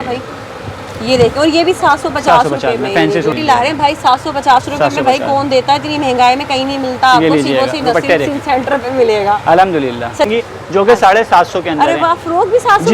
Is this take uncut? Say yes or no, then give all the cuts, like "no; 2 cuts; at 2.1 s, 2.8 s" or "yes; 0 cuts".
no; 2 cuts; at 3.3 s, 10.3 s